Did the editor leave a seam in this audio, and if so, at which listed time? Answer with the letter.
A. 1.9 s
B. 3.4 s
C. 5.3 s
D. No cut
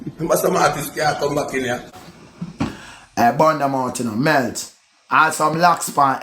A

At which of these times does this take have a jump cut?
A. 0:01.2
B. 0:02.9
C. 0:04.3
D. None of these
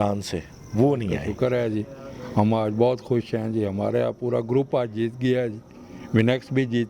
A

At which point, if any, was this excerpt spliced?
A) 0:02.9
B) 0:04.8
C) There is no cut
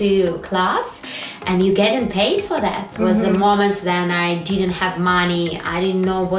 A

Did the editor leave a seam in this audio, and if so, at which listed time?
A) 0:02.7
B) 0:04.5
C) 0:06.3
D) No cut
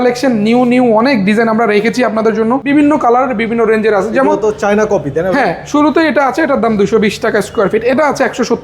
A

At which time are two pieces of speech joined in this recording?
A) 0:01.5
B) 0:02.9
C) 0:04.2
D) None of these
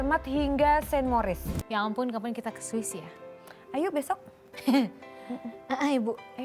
A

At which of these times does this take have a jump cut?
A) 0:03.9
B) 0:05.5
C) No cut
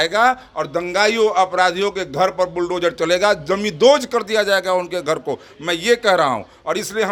C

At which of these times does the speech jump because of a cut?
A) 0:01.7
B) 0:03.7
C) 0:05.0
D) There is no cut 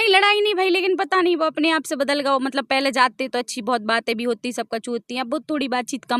D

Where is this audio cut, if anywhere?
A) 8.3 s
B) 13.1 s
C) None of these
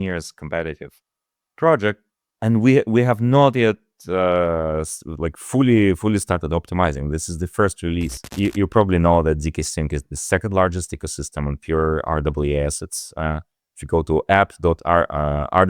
A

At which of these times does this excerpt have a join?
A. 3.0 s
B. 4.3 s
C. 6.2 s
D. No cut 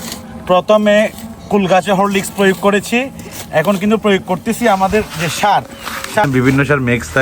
C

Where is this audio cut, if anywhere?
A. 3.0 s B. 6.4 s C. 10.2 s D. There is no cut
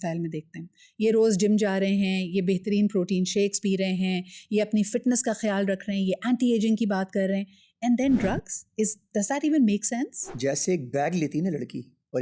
C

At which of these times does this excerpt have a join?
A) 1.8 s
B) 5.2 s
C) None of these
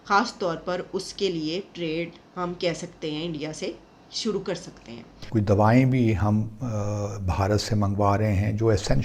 B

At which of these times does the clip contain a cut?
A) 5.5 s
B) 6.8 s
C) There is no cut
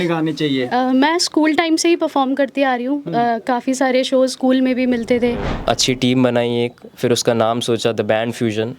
A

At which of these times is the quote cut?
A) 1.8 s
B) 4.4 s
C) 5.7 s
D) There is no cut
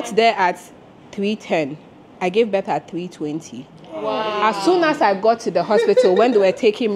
D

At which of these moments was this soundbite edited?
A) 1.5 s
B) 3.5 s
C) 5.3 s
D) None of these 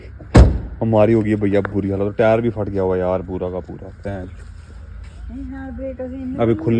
D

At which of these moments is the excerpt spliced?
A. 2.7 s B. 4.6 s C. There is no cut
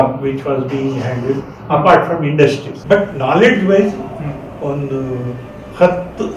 A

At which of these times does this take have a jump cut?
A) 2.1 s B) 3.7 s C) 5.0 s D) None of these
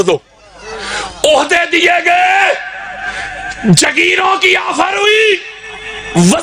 D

